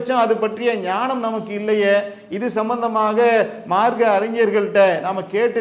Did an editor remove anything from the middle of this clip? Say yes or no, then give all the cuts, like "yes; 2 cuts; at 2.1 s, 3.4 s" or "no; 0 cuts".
no; 0 cuts